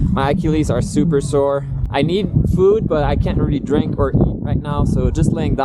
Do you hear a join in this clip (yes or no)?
yes